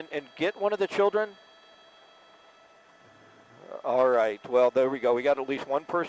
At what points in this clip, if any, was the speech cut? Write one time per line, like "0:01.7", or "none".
none